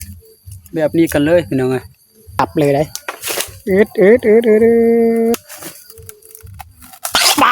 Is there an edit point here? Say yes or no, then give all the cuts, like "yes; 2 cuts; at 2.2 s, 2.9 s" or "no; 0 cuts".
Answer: yes; 1 cut; at 2.4 s